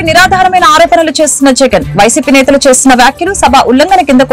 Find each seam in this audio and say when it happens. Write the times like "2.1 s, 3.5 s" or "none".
none